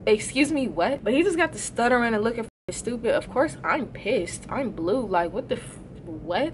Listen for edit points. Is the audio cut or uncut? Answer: cut